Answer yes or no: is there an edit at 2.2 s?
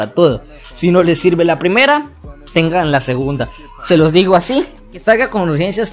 no